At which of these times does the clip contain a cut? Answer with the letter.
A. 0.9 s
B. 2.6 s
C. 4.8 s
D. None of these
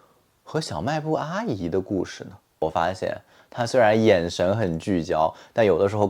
B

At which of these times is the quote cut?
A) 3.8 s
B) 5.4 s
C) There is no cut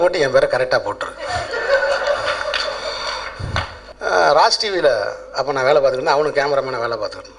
A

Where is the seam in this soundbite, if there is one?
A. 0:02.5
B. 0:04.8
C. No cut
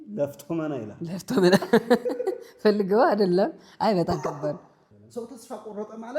B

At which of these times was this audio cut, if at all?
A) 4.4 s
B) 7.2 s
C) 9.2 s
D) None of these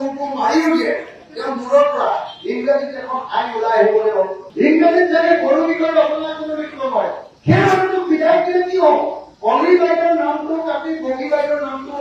A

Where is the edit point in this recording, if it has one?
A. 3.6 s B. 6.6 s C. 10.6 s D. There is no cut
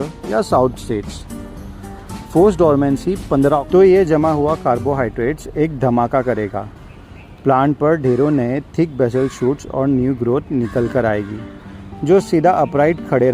A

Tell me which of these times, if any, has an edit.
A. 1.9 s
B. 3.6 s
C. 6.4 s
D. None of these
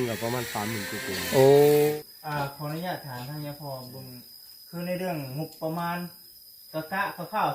A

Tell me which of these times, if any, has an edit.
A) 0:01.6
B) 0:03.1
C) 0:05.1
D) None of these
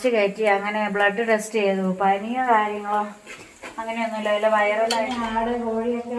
C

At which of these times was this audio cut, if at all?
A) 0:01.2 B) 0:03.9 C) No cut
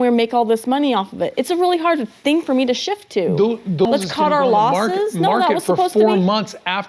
B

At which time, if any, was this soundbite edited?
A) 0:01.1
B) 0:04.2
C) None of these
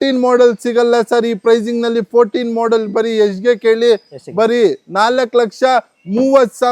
C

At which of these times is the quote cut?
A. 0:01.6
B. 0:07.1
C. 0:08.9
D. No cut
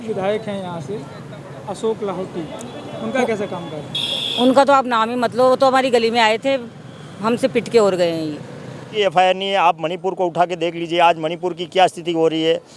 C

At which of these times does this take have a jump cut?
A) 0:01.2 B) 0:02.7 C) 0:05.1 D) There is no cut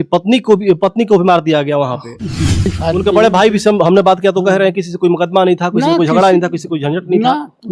B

